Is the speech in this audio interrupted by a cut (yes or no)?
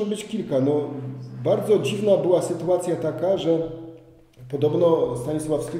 no